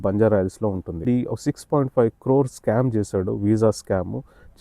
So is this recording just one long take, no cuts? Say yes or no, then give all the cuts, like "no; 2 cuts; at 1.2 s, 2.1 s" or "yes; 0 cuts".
no; 1 cut; at 1.0 s